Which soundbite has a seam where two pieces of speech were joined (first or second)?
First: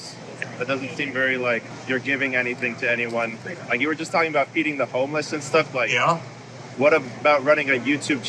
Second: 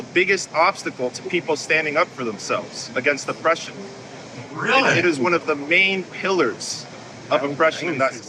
first